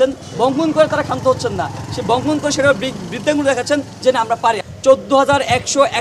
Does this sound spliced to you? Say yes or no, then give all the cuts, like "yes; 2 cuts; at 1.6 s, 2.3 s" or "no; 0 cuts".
yes; 1 cut; at 4.7 s